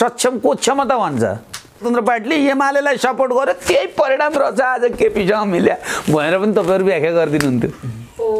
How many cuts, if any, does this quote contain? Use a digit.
1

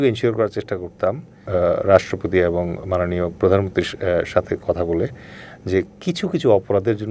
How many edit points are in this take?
1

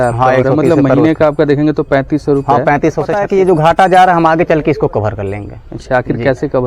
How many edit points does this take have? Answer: 1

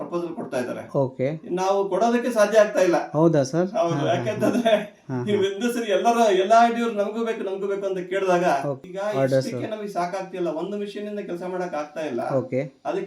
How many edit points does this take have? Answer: 1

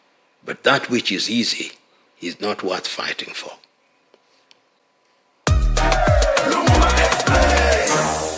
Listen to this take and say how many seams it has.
1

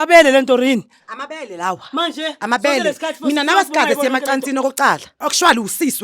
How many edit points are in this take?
1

